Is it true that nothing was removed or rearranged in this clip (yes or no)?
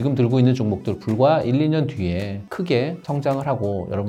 yes